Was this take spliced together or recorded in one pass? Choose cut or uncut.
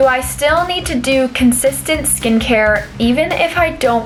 uncut